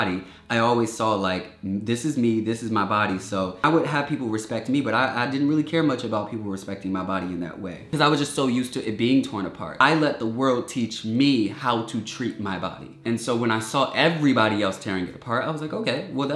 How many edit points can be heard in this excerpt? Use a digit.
4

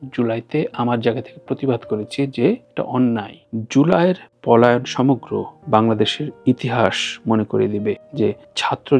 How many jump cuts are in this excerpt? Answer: 1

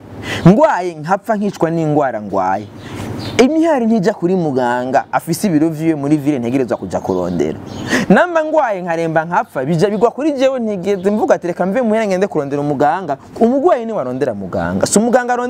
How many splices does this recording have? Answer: 0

